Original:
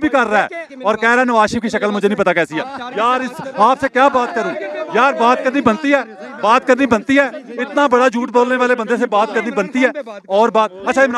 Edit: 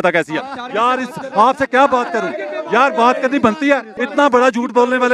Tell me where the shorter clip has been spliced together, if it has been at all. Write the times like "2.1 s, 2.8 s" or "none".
4.0 s